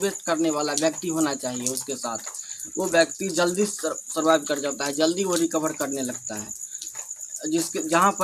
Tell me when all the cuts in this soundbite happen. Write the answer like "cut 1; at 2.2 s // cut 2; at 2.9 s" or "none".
none